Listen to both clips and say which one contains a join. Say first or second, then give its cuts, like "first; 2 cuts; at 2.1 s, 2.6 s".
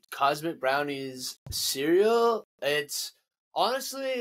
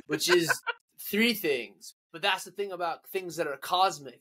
second; 1 cut; at 1.9 s